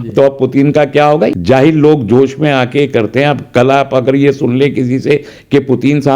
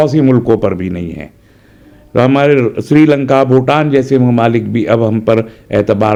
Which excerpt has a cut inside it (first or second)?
first